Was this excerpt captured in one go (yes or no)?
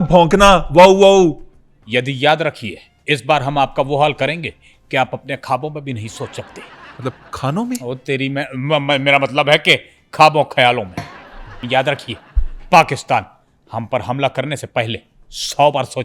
no